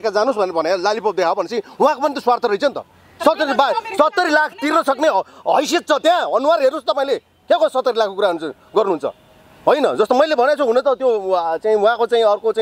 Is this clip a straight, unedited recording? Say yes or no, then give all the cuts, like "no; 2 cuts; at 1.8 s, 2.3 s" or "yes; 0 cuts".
yes; 0 cuts